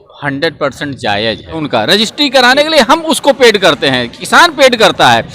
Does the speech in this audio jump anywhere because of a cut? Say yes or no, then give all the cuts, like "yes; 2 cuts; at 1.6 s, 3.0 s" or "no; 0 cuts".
yes; 1 cut; at 1.6 s